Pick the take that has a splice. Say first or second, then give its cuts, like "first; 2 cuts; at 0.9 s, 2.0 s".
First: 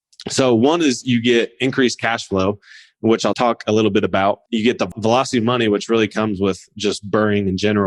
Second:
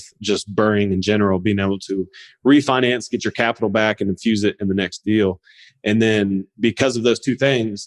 first; 2 cuts; at 3.3 s, 4.9 s